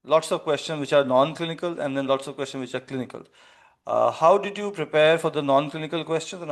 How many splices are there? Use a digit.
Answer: 0